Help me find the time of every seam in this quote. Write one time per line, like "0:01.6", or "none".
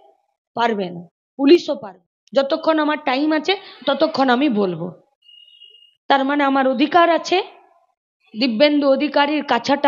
0:01.8